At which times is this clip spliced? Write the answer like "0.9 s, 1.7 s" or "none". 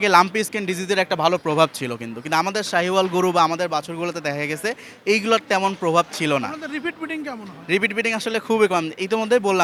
none